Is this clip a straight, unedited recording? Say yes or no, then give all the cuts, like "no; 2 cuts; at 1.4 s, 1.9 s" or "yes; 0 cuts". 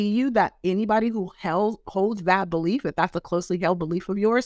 yes; 0 cuts